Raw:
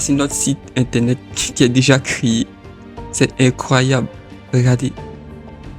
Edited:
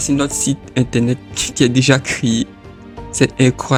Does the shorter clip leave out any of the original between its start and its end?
no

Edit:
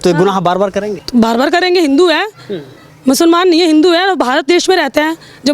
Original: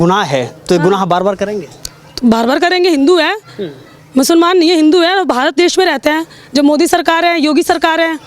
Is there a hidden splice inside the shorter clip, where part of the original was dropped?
yes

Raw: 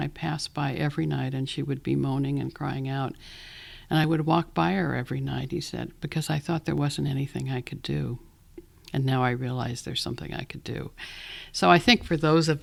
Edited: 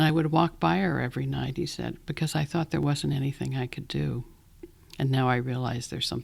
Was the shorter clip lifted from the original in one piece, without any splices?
yes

